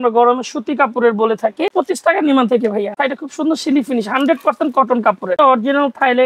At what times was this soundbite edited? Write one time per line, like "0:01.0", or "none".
0:01.7
0:03.0
0:05.4